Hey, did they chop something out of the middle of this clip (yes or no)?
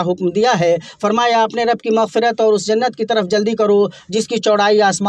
no